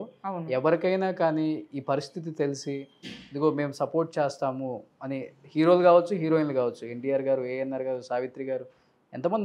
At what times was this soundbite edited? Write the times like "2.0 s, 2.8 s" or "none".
none